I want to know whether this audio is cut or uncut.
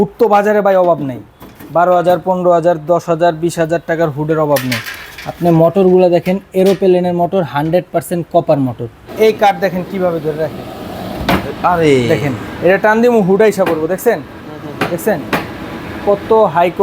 cut